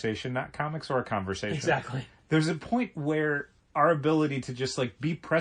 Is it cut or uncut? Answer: uncut